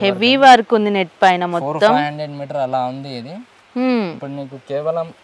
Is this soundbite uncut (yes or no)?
yes